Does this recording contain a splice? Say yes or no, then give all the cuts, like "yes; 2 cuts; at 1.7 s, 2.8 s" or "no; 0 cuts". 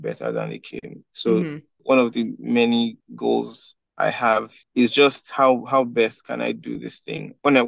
yes; 1 cut; at 4.6 s